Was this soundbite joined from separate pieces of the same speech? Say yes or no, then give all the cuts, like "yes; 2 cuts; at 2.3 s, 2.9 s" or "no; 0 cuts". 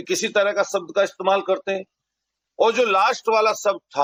no; 0 cuts